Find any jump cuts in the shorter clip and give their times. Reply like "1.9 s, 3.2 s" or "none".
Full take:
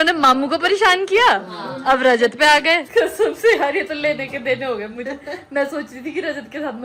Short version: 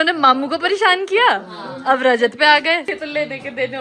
2.9 s